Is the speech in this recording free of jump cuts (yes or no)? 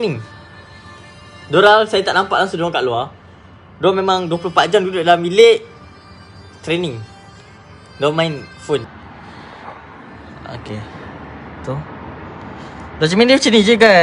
no